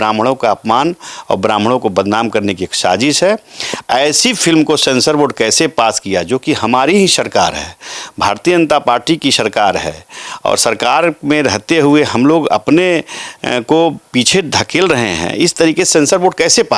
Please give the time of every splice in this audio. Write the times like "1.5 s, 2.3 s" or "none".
none